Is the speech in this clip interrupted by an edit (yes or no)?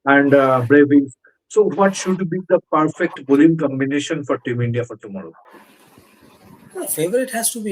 yes